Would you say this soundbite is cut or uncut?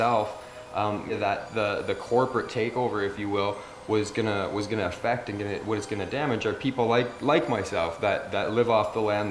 cut